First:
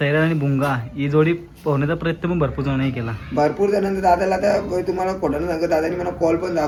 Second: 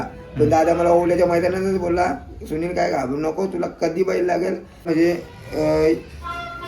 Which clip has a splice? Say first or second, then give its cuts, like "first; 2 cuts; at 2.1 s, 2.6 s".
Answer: second; 1 cut; at 4.9 s